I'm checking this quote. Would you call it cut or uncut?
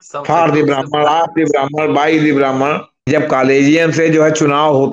cut